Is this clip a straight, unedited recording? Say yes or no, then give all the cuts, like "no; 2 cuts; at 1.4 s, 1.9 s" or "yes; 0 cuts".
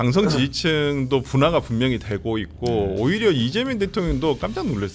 yes; 0 cuts